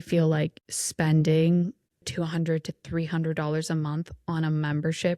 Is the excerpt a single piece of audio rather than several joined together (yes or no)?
no